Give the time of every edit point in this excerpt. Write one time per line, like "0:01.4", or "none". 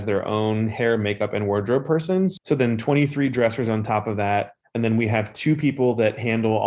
0:02.3
0:04.6